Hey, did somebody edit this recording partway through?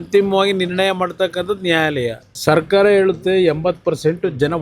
yes; 1 cut; at 2.3 s

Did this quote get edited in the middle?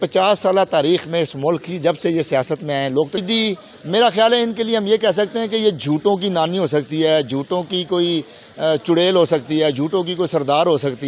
yes; 1 cut; at 3.2 s

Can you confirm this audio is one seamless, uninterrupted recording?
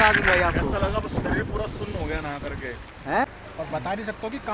no; 1 cut; at 3.2 s

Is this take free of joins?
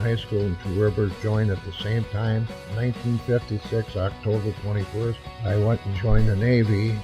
no; 1 cut; at 2.6 s

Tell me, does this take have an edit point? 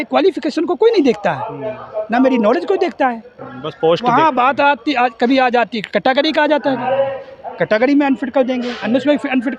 no; 0 cuts

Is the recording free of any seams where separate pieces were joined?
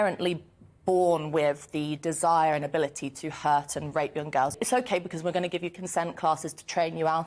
no; 1 cut; at 4.6 s

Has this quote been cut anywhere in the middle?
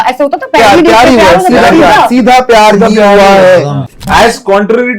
yes; 1 cut; at 4.0 s

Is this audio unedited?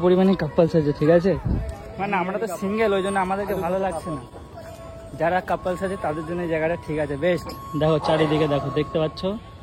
yes; 0 cuts

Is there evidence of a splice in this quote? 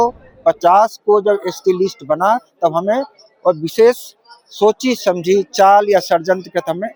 no; 0 cuts

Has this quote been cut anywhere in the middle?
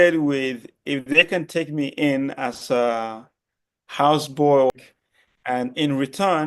yes; 1 cut; at 4.7 s

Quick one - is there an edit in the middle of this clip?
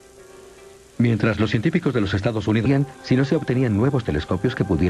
no; 0 cuts

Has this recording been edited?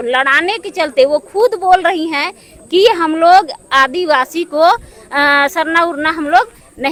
no; 0 cuts

